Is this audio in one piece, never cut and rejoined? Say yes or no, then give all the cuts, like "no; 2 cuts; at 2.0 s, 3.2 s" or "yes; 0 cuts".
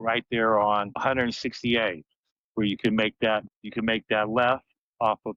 yes; 0 cuts